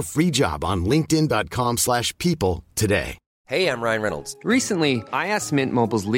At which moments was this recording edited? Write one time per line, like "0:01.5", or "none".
0:03.2